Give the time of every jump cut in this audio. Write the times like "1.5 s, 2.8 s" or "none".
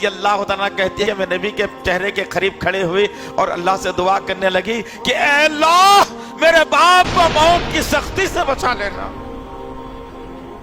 1.0 s